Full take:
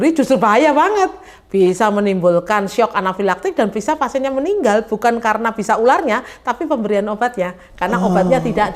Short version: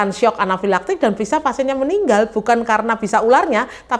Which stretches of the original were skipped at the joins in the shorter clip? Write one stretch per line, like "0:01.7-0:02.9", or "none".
none